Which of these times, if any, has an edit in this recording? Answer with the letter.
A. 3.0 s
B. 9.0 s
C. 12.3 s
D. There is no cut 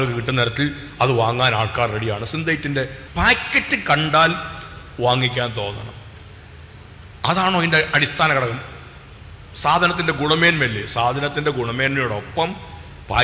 A